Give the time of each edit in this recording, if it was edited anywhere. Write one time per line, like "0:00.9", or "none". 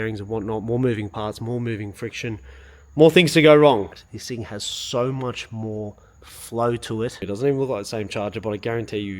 0:04.0
0:07.2